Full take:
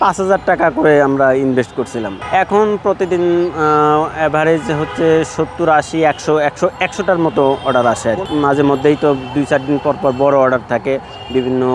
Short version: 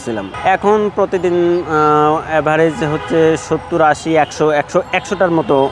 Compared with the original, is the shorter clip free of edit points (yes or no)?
yes